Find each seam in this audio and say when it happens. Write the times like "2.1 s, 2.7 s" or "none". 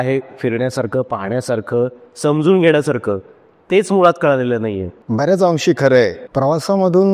4.9 s, 6.2 s